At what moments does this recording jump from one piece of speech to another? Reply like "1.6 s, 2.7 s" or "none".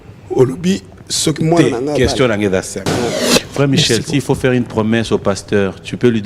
3.3 s